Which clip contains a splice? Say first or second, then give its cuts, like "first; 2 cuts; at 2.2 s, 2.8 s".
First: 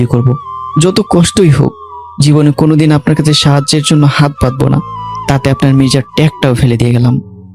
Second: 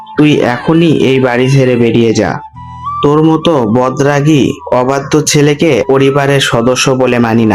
second; 1 cut; at 5.8 s